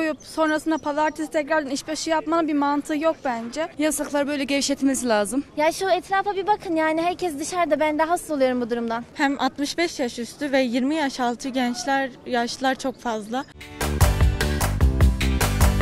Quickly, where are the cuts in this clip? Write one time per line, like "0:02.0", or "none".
0:03.7
0:05.5
0:09.1
0:13.6